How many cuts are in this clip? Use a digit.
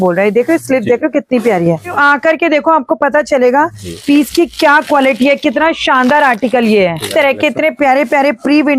2